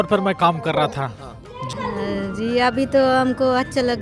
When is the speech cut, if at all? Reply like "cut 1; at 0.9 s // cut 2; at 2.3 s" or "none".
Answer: cut 1; at 1.7 s

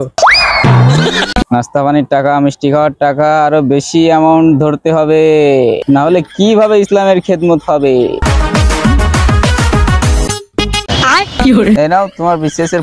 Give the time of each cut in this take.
cut 1; at 1.4 s // cut 2; at 5.8 s // cut 3; at 8.2 s

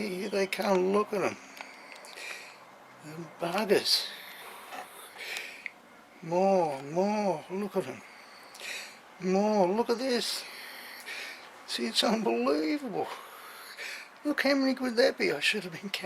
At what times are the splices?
cut 1; at 4.4 s

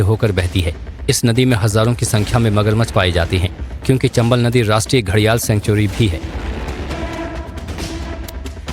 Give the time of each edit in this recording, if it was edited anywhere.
cut 1; at 1.3 s

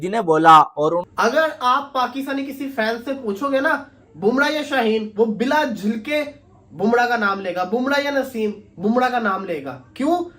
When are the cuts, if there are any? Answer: cut 1; at 1.1 s

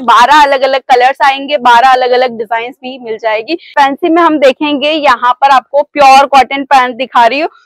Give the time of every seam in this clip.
cut 1; at 3.7 s

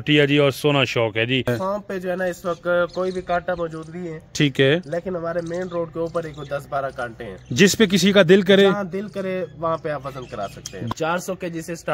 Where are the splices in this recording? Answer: cut 1; at 1.5 s // cut 2; at 10.8 s

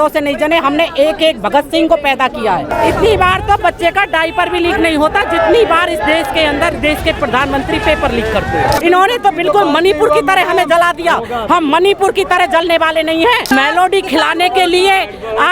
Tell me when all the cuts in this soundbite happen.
cut 1; at 2.7 s // cut 2; at 8.8 s // cut 3; at 13.5 s

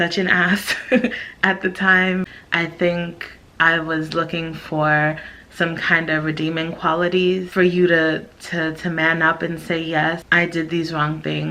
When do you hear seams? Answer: cut 1; at 2.4 s // cut 2; at 7.5 s // cut 3; at 10.2 s

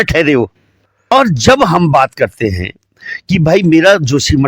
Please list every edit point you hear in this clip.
cut 1; at 1.1 s

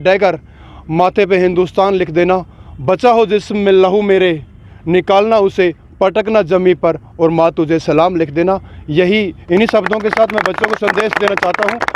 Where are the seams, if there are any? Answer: none

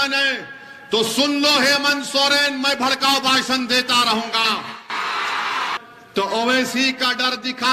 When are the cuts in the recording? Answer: cut 1; at 5.7 s

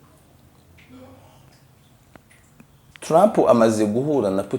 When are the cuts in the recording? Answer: cut 1; at 1.8 s

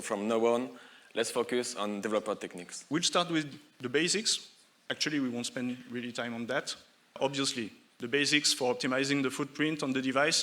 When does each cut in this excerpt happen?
cut 1; at 2.8 s // cut 2; at 7.1 s

